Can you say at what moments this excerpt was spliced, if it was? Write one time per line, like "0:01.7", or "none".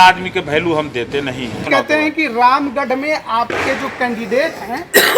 0:01.6